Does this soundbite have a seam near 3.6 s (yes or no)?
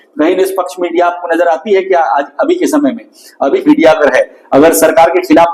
yes